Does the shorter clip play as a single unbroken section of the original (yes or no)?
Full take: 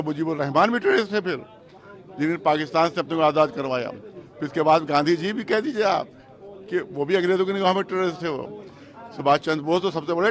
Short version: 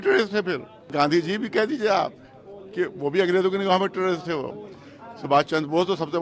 no